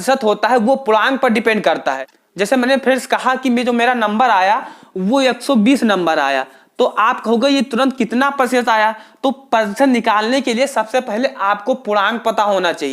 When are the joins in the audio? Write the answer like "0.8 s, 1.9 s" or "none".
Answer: none